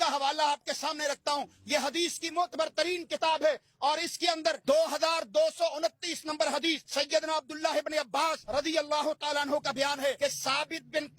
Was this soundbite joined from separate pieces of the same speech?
yes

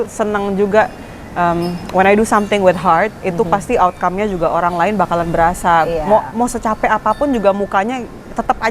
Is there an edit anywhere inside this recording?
no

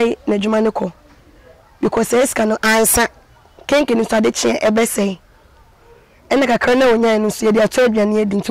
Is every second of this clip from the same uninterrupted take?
yes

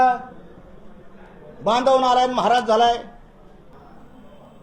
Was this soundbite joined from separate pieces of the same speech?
yes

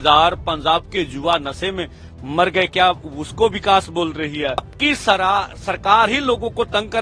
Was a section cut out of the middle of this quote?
yes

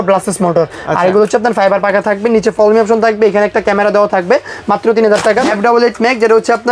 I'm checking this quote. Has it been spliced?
yes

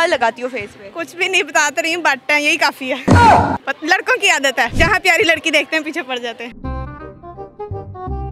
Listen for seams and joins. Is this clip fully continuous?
no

